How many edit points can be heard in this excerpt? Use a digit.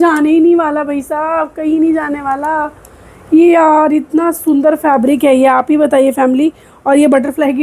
0